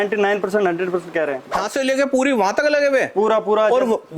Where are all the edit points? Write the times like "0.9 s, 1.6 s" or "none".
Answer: 1.6 s